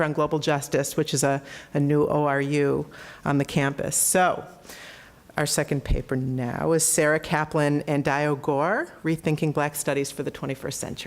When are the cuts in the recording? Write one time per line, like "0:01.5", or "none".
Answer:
0:09.4